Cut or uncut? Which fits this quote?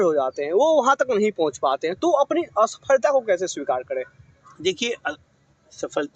uncut